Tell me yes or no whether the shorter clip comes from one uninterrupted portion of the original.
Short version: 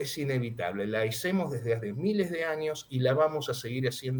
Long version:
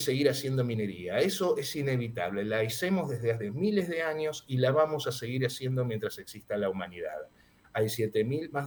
yes